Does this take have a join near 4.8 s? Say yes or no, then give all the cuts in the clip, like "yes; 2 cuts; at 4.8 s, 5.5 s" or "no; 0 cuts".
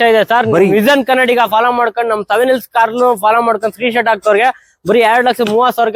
no; 0 cuts